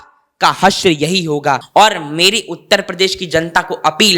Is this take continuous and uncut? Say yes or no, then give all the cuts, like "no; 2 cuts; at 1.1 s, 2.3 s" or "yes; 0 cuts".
no; 1 cut; at 1.6 s